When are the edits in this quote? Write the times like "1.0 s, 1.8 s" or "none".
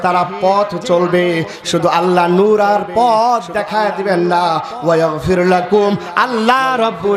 none